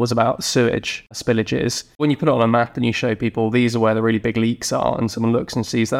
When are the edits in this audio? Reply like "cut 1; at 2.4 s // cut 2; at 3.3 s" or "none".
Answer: cut 1; at 1.2 s // cut 2; at 2.0 s